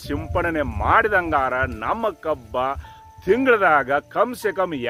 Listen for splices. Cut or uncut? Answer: uncut